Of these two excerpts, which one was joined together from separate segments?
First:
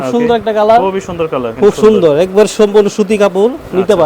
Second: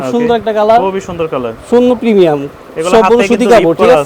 first; 1 cut; at 1.5 s

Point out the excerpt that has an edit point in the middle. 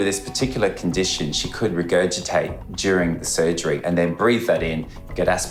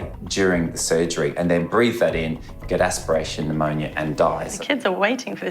second; 1 cut; at 4.5 s

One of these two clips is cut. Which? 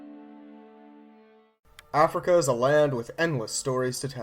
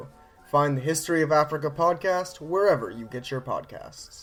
first; 1 cut; at 1.5 s

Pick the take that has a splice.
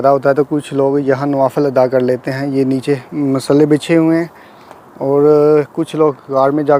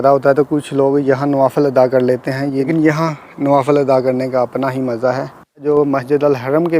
second; 2 cuts; at 2.7 s, 5.6 s

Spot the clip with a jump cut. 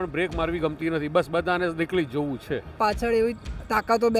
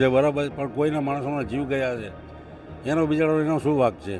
first; 1 cut; at 2.7 s

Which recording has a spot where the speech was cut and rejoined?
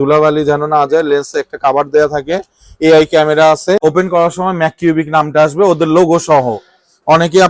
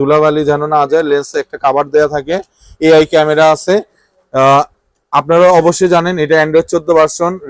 first; 1 cut; at 3.8 s

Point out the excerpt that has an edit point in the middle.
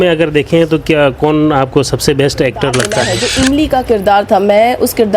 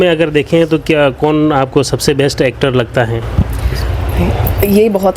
first; 1 cut; at 3.2 s

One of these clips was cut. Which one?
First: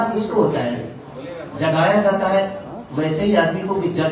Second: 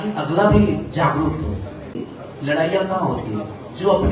second; 1 cut; at 2.0 s

